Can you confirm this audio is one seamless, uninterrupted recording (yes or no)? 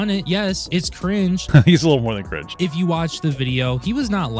no